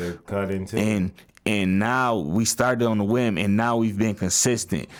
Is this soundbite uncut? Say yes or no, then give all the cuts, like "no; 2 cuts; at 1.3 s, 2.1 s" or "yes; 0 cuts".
yes; 0 cuts